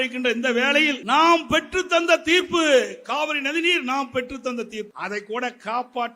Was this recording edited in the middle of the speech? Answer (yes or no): yes